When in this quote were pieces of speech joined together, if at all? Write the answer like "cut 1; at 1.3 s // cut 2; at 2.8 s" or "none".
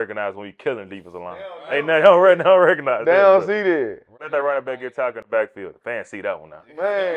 cut 1; at 4.2 s